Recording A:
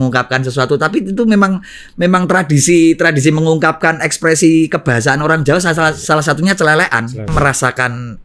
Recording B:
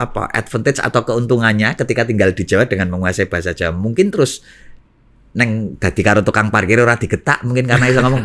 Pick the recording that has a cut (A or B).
A